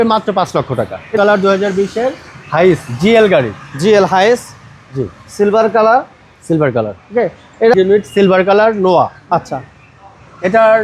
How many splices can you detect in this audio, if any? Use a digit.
2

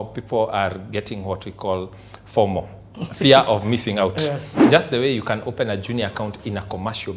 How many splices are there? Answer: 1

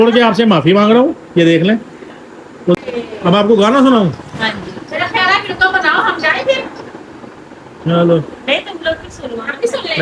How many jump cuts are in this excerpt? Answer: 1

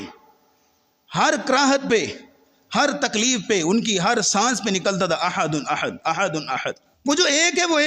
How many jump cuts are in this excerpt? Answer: 1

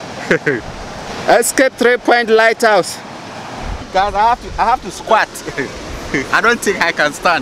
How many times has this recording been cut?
2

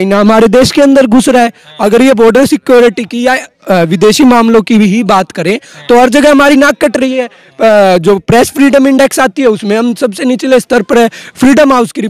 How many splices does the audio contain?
0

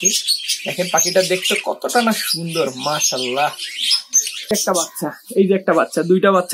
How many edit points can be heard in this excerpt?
1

